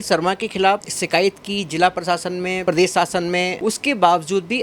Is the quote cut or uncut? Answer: cut